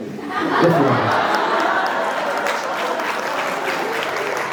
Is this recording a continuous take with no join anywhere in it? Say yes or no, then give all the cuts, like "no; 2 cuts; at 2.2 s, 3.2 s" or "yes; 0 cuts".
yes; 0 cuts